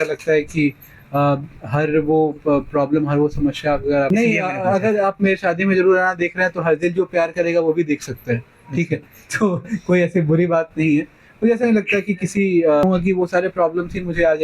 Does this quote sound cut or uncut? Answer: cut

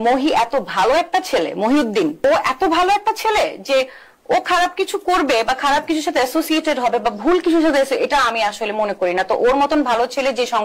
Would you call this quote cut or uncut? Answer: cut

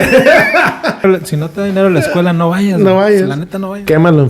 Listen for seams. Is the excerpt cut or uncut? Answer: cut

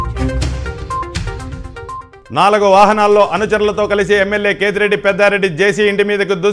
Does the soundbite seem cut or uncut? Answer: cut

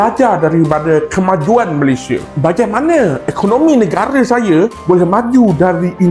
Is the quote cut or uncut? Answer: uncut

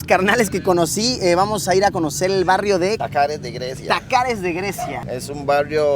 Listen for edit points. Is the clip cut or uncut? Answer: cut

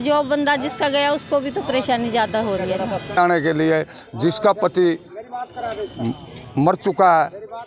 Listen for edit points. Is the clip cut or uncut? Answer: cut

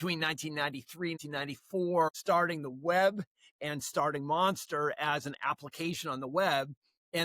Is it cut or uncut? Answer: cut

